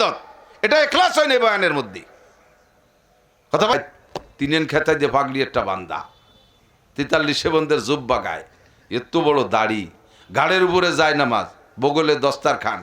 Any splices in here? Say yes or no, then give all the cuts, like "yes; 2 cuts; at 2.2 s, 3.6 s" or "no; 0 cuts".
yes; 1 cut; at 3.7 s